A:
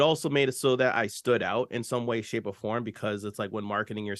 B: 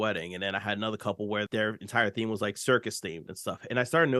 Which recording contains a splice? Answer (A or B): B